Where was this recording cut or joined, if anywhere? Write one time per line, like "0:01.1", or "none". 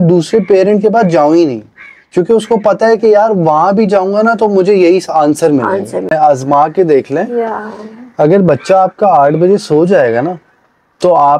0:06.1